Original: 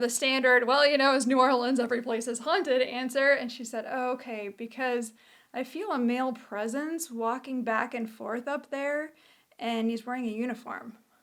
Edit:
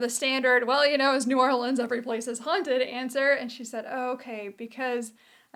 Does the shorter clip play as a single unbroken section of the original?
yes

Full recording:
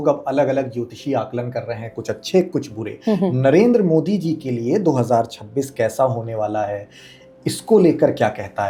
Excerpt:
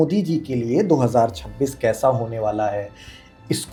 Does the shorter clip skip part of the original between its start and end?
no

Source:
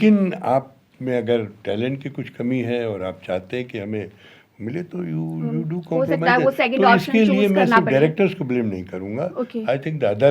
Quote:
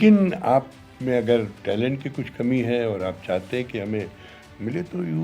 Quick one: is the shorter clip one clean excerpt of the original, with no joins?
yes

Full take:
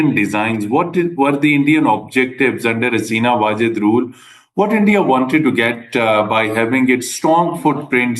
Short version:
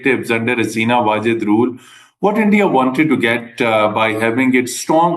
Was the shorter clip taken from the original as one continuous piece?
yes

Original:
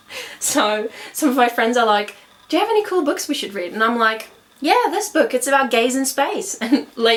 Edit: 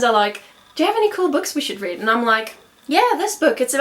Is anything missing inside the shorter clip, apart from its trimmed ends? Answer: no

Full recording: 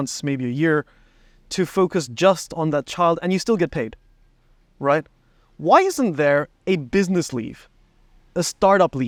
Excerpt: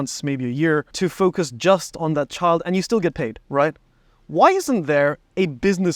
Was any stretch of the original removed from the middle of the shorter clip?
yes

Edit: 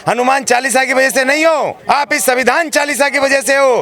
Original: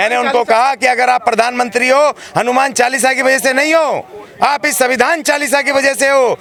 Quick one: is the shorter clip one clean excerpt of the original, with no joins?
no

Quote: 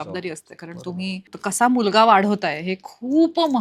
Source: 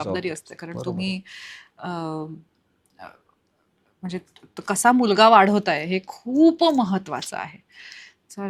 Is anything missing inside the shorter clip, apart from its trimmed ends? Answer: yes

